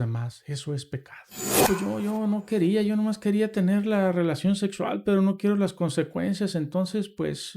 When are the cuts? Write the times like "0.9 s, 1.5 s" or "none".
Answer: 1.6 s